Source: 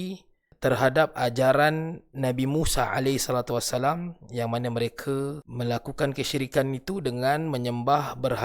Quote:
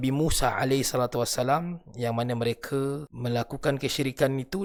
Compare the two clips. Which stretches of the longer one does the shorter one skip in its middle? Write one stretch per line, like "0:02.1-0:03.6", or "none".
none